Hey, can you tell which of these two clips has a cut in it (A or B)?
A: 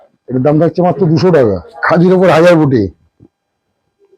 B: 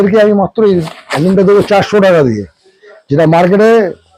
A